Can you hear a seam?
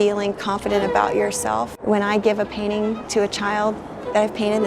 yes; 1 cut; at 1.7 s

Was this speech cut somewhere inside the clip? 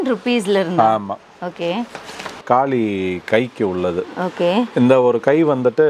yes; 1 cut; at 2.4 s

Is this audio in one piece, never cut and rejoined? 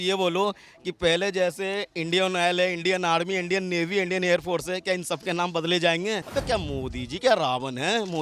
no; 1 cut; at 6.2 s

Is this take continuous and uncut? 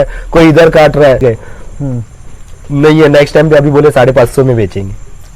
no; 1 cut; at 1.2 s

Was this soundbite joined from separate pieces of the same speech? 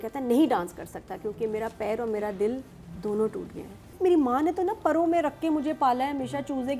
yes; 1 cut; at 3.9 s

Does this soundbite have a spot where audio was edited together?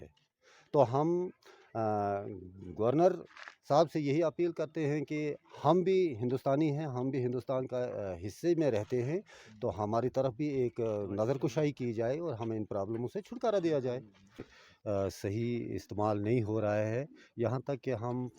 yes; 1 cut; at 14.5 s

